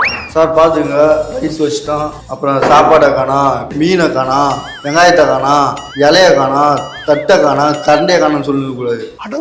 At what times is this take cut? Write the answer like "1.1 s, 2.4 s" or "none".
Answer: 2.2 s, 3.7 s